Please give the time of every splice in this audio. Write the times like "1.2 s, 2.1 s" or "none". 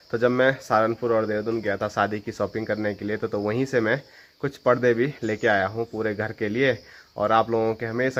none